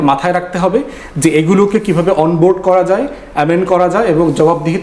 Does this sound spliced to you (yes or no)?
no